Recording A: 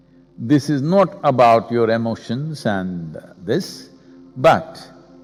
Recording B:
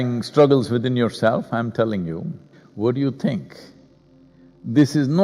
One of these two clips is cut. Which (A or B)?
B